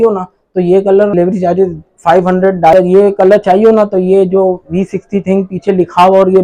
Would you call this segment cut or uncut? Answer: cut